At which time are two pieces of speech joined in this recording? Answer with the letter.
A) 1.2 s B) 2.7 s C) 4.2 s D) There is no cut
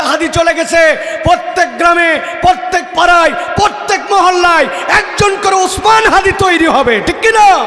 D